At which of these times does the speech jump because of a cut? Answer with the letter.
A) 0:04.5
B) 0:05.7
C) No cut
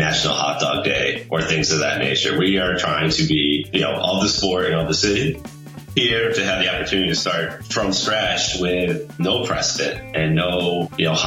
B